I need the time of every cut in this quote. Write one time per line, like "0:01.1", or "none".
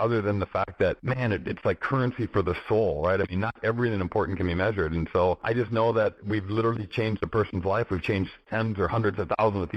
0:01.0
0:05.4
0:06.2
0:08.4

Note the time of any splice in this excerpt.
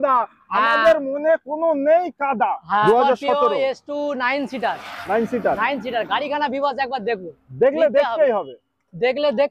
0:02.9

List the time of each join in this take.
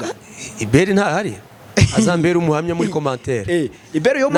none

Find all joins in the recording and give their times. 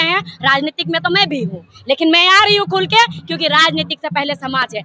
none

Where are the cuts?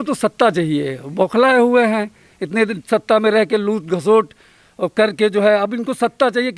none

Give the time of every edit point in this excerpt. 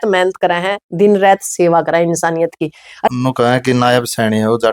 0:03.1

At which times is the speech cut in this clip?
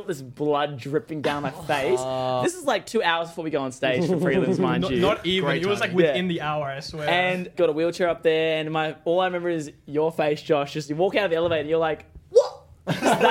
0:02.4
0:07.5

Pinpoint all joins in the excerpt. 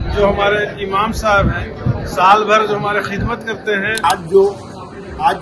0:04.0

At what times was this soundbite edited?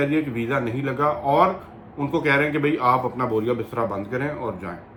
none

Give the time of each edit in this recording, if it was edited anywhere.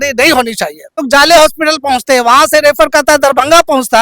0:01.0

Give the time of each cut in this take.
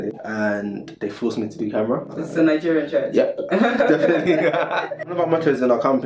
0:02.1
0:05.0

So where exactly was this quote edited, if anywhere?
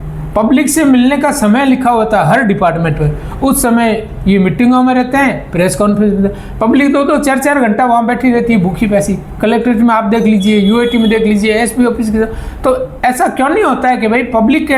none

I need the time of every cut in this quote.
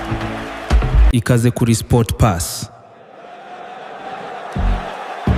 0:01.1

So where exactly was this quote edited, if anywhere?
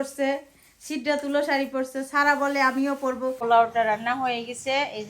0:03.4

